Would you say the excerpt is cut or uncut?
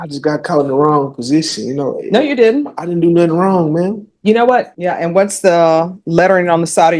cut